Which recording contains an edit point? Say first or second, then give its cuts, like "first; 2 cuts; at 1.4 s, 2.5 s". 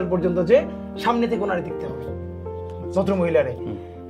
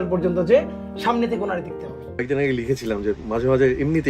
second; 1 cut; at 2.2 s